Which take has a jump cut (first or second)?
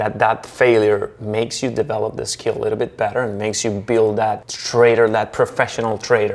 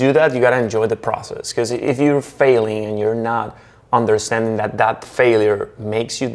first